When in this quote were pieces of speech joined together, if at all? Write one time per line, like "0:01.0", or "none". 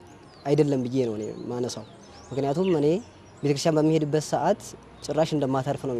none